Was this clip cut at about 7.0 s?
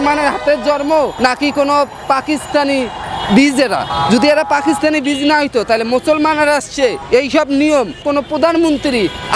yes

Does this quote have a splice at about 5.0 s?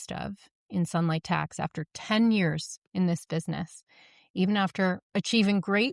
yes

